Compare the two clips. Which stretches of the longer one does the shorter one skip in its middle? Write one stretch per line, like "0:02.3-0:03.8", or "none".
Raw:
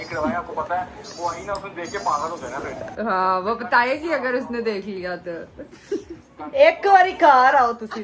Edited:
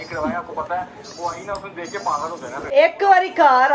0:02.7-0:06.5